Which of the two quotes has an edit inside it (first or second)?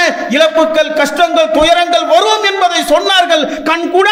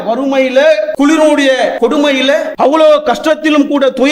second